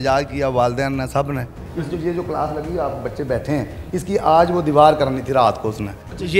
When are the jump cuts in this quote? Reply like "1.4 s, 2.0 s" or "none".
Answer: none